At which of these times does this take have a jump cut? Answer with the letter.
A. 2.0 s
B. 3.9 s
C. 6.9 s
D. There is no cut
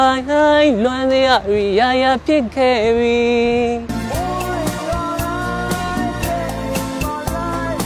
B